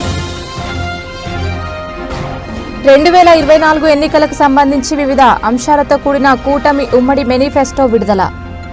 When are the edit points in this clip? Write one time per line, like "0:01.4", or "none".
0:01.1